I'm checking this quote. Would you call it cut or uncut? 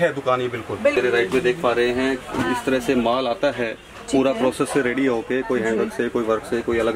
cut